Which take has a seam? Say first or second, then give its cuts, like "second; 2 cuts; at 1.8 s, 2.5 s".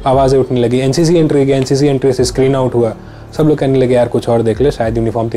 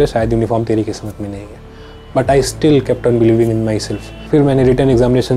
second; 1 cut; at 4.3 s